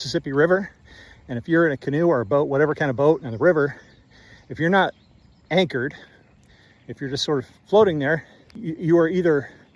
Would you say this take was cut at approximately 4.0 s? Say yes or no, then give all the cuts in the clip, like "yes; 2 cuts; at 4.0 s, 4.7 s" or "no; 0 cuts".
no; 1 cut; at 6.3 s